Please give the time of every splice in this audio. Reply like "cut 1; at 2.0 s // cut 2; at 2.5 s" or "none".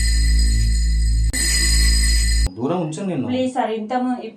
none